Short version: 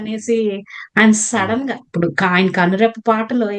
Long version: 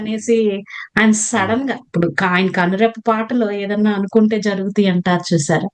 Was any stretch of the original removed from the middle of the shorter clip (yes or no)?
no